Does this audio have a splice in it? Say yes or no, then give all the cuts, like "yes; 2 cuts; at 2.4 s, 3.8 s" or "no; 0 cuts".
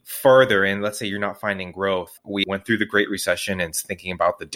yes; 1 cut; at 2.2 s